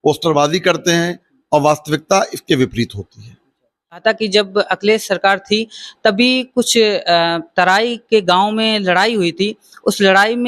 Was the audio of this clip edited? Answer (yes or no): yes